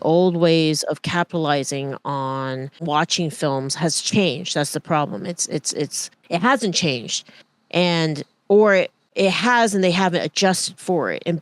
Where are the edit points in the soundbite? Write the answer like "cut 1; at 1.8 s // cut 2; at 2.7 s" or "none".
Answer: cut 1; at 2.8 s // cut 2; at 9.0 s